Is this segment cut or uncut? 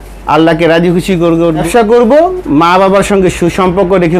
cut